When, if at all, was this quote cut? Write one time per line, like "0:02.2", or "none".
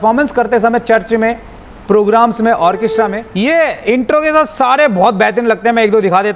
0:03.2